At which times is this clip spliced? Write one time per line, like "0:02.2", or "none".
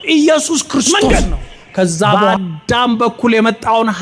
0:02.3